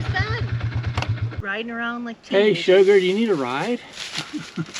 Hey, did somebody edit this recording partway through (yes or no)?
yes